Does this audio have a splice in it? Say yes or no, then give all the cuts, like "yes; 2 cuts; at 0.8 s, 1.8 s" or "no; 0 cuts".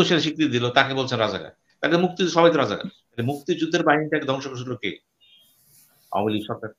yes; 1 cut; at 3.1 s